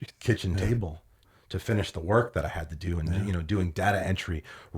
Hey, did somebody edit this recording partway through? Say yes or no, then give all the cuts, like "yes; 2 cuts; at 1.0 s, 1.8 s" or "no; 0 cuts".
yes; 1 cut; at 1.3 s